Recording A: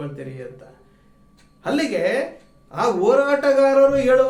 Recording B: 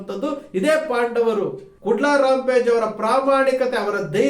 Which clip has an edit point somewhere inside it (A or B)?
B